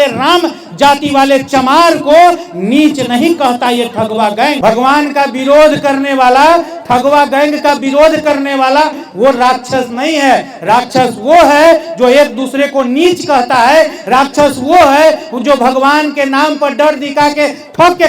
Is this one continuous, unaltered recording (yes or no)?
no